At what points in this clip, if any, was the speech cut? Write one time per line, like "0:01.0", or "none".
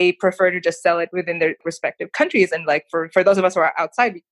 0:01.3